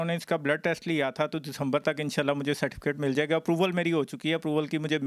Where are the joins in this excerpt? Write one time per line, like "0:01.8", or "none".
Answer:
none